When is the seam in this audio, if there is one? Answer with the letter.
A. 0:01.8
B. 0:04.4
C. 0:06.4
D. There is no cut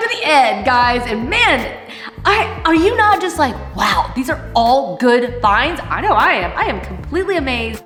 D